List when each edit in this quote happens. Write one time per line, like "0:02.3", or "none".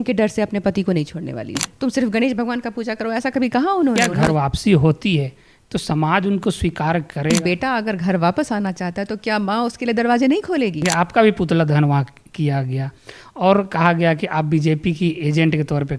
0:01.7
0:04.0
0:07.3
0:10.9